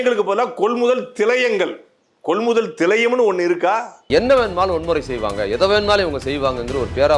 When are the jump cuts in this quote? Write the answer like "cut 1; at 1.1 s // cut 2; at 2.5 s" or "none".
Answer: cut 1; at 3.9 s